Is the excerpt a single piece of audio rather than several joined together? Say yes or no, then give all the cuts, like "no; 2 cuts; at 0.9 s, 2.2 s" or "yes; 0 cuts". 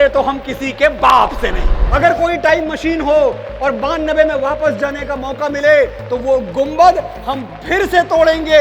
no; 1 cut; at 1.8 s